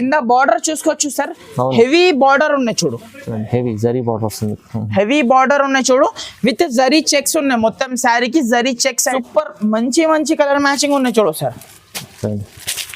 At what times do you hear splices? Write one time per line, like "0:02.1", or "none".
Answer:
0:09.1